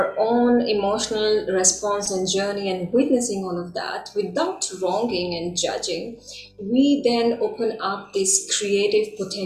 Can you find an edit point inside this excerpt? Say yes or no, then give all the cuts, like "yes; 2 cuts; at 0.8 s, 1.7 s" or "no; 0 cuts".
no; 0 cuts